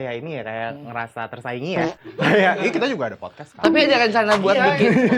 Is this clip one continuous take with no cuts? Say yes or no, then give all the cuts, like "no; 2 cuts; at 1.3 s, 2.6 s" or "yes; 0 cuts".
yes; 0 cuts